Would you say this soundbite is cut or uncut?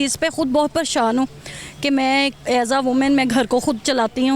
uncut